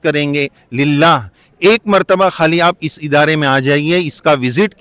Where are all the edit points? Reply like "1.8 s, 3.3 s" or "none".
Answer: none